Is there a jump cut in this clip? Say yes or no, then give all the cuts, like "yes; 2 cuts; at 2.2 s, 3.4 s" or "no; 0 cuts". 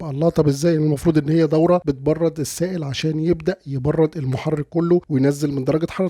yes; 2 cuts; at 1.8 s, 5.1 s